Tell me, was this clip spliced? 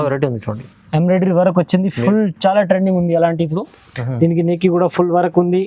no; 0 cuts

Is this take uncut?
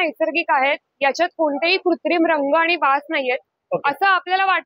yes; 0 cuts

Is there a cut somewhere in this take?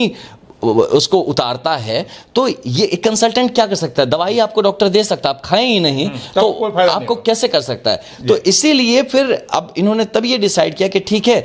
no; 0 cuts

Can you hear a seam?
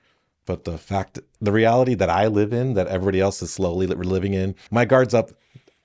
yes; 1 cut; at 4.6 s

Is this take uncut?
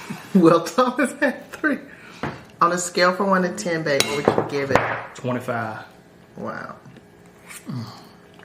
no; 1 cut; at 7.0 s

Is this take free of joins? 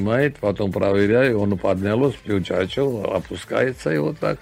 yes; 0 cuts

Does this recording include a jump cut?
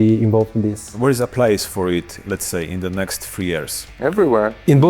yes; 3 cuts; at 0.9 s, 2.2 s, 3.8 s

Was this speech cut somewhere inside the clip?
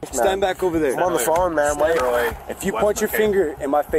yes; 1 cut; at 2.0 s

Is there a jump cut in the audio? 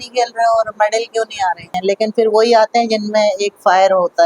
yes; 1 cut; at 1.7 s

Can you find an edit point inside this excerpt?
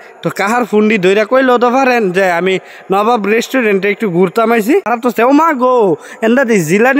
yes; 1 cut; at 4.9 s

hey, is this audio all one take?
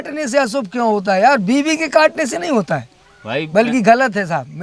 yes; 0 cuts

